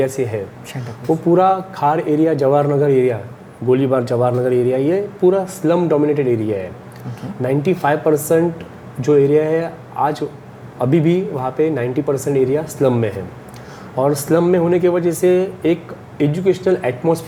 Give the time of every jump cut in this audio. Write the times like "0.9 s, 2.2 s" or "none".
none